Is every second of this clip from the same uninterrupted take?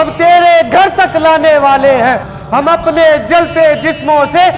yes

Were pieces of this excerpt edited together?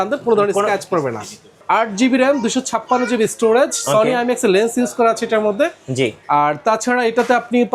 yes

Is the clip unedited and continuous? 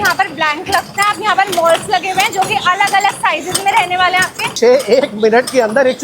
no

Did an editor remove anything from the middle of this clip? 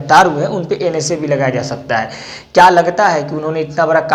no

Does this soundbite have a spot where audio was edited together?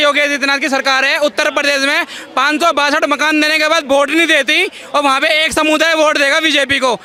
no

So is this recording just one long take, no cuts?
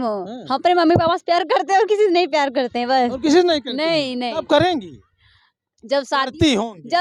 yes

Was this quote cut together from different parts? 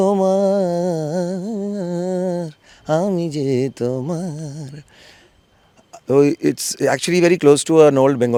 no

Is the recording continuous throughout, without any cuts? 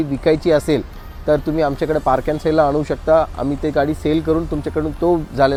yes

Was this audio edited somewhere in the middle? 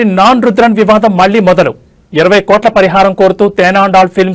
no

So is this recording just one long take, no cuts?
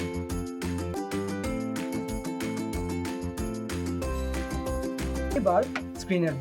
no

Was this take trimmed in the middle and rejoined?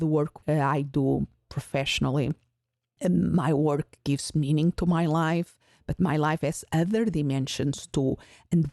no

